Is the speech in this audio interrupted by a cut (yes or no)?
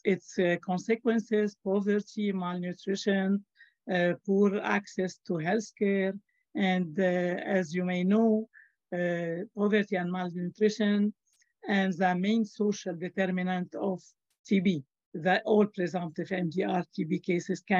yes